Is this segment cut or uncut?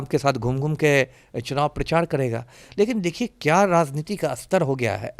uncut